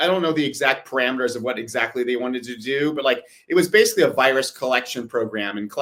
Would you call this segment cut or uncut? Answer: uncut